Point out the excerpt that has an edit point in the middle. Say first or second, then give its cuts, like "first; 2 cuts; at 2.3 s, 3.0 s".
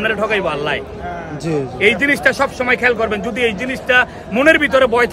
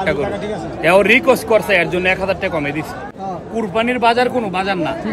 second; 1 cut; at 3.1 s